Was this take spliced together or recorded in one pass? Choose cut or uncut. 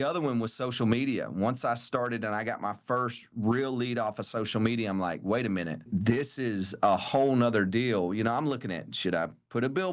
cut